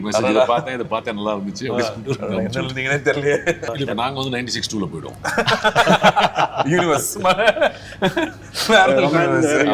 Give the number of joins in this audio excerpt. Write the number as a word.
one